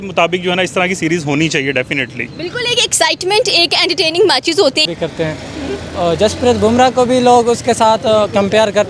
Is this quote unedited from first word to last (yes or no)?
no